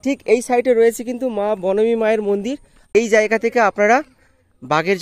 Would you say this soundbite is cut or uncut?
cut